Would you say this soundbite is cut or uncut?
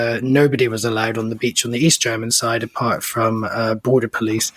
uncut